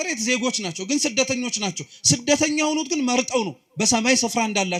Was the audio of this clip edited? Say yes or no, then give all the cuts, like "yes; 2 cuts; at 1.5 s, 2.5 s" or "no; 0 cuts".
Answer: no; 0 cuts